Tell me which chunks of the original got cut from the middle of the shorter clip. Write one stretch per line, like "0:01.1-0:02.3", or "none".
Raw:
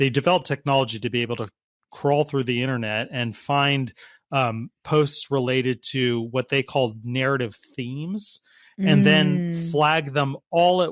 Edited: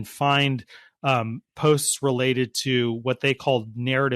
none